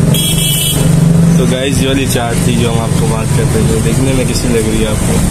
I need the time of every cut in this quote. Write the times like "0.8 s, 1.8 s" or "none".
none